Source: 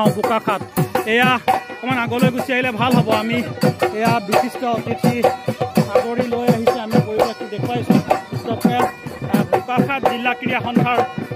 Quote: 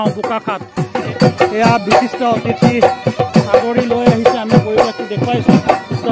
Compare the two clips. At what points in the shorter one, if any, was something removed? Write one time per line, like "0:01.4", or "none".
0:01.1